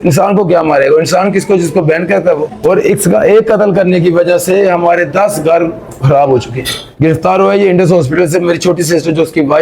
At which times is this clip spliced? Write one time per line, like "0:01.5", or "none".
0:02.5
0:06.7